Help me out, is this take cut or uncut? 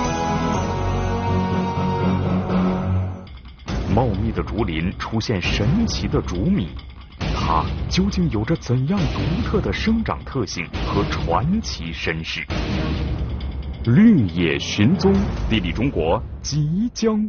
uncut